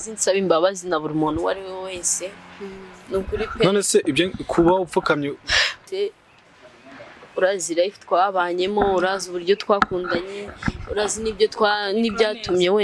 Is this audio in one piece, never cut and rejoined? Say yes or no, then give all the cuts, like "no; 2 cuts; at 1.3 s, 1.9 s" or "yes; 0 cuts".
no; 1 cut; at 5.8 s